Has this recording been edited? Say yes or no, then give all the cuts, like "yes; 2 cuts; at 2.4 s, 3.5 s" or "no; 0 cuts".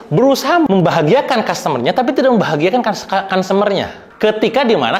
no; 0 cuts